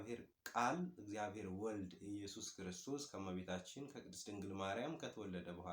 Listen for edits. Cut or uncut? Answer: uncut